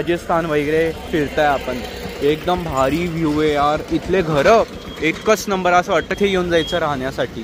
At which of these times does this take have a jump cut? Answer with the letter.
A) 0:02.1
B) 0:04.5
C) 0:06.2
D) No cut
D